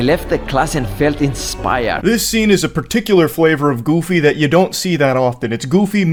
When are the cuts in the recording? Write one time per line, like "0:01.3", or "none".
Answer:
none